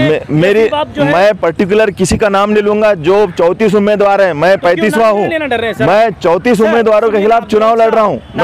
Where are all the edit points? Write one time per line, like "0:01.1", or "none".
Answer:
none